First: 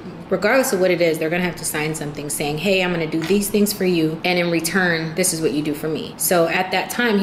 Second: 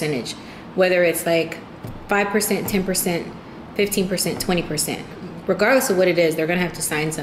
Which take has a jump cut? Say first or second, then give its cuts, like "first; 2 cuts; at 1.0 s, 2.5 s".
first; 3 cuts; at 3.2 s, 4.2 s, 6.1 s